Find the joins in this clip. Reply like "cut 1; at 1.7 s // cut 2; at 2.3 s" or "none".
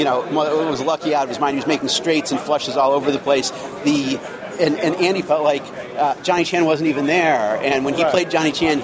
none